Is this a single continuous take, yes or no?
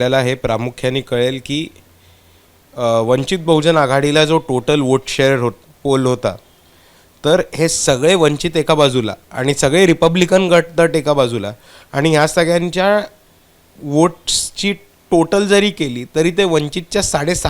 yes